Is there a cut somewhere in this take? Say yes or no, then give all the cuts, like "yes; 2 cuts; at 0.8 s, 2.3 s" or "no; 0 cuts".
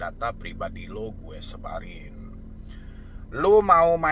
no; 0 cuts